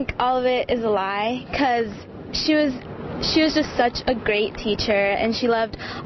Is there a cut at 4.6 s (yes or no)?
yes